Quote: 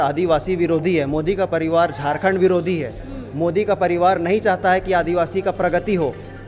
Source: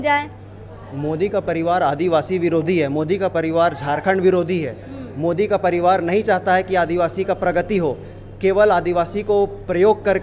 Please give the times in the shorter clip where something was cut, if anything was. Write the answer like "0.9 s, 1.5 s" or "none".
none